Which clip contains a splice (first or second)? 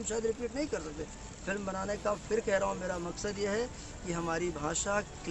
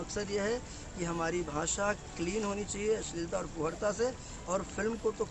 first